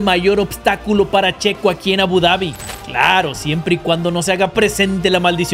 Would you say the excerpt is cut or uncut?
cut